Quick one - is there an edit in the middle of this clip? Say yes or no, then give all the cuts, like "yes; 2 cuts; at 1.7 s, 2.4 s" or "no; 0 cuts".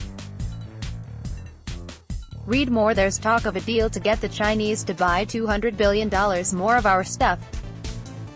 no; 0 cuts